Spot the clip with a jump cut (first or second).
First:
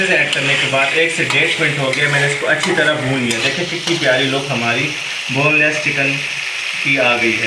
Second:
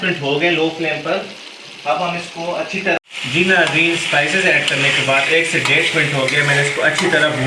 second